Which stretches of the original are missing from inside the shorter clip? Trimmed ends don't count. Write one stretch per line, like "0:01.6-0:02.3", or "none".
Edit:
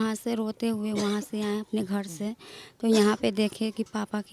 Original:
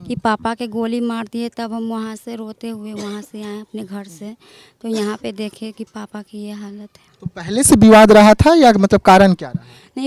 none